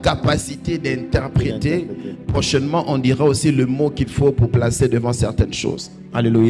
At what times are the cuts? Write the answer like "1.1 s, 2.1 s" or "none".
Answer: none